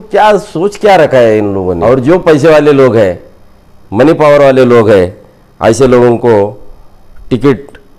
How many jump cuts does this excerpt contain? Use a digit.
1